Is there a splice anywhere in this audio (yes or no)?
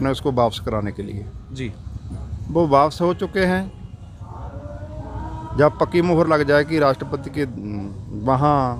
no